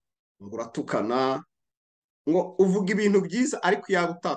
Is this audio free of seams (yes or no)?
yes